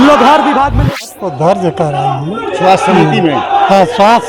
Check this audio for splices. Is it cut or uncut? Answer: cut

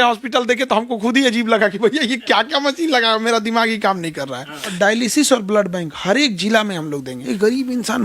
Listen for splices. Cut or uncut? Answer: cut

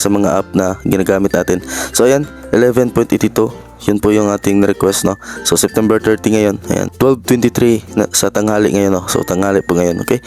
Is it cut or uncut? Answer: cut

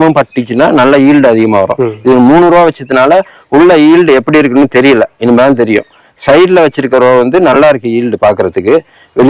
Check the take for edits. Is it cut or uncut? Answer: uncut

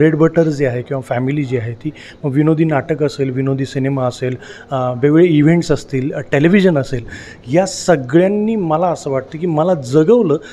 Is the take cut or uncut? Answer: uncut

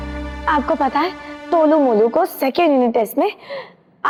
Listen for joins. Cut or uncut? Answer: uncut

